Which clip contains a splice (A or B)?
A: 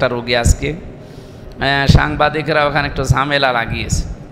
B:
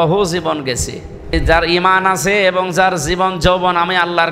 B